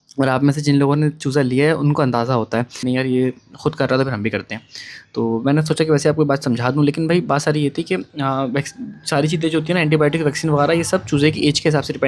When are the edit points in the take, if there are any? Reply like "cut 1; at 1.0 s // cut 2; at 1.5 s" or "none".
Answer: cut 1; at 2.8 s